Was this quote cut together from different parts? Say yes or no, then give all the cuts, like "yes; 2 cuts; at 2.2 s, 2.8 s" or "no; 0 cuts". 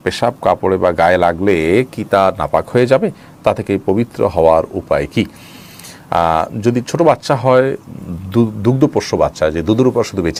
no; 0 cuts